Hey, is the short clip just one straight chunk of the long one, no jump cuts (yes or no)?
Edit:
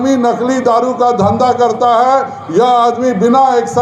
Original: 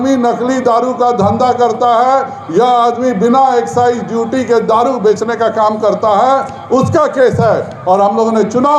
yes